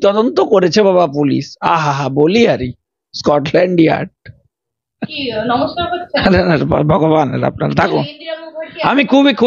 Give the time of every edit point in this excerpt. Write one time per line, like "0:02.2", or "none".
none